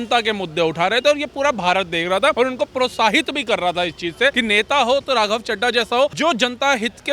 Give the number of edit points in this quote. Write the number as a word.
three